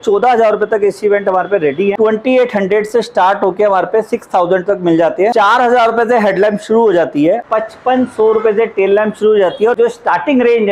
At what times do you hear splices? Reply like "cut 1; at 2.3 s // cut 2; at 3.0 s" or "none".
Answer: cut 1; at 1.9 s // cut 2; at 5.3 s // cut 3; at 7.5 s // cut 4; at 9.7 s